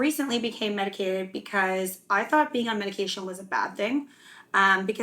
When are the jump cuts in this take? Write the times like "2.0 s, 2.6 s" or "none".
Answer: none